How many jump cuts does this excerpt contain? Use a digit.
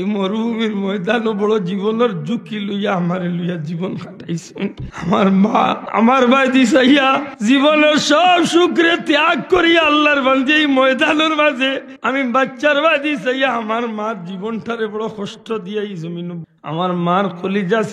5